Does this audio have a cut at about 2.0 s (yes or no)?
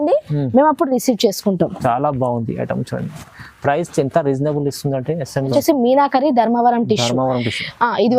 no